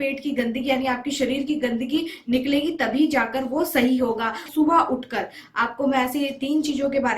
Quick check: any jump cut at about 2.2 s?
no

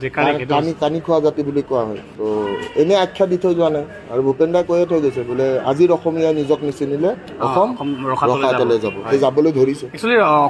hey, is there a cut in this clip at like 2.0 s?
yes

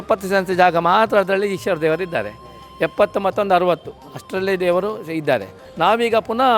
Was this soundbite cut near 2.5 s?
no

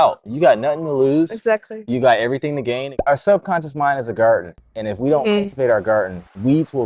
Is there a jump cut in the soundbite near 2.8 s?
yes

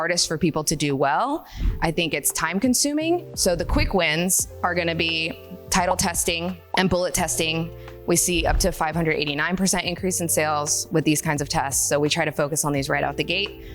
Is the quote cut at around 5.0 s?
no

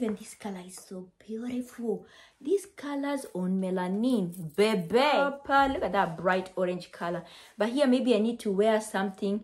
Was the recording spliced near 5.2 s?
yes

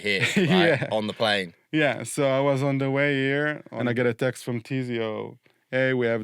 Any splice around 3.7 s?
yes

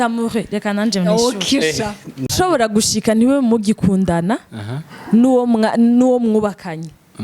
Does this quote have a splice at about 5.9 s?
no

